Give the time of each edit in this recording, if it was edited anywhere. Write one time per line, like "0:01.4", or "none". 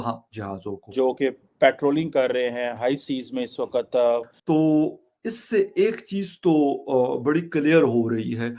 0:00.9
0:04.3